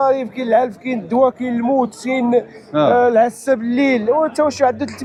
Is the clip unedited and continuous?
yes; 0 cuts

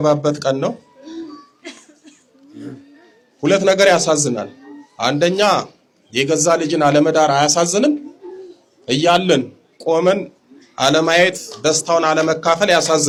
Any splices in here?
no; 0 cuts

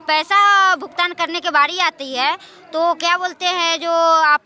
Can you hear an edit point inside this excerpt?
no; 0 cuts

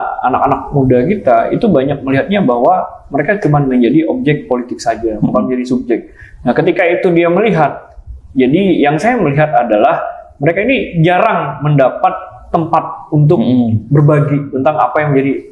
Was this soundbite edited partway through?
no; 0 cuts

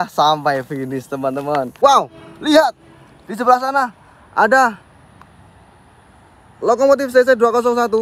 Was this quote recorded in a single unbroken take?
no; 1 cut; at 1.8 s

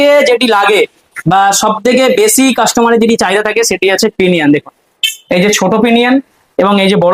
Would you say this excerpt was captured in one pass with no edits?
yes; 0 cuts

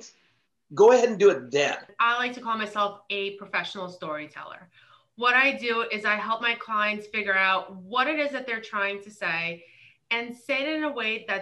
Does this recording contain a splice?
yes; 1 cut; at 1.9 s

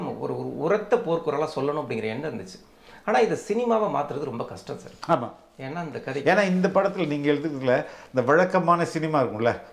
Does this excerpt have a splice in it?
no; 0 cuts

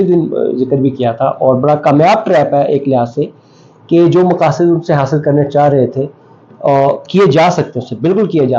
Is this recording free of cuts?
yes; 0 cuts

